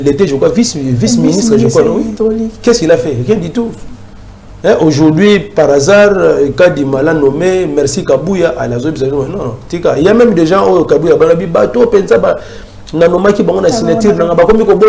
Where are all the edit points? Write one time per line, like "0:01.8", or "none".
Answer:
none